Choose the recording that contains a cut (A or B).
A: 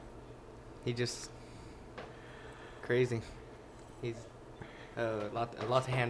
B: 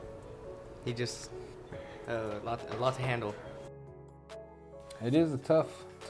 B